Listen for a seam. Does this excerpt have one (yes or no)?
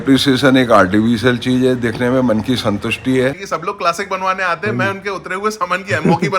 yes